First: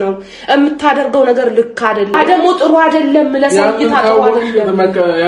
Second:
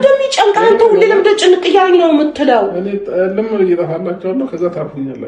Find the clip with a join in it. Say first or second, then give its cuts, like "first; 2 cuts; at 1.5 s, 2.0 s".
first; 1 cut; at 2.1 s